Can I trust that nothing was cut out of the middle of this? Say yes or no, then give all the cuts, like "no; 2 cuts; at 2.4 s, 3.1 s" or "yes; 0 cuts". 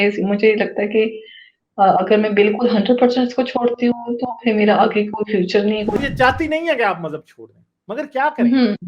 no; 1 cut; at 5.9 s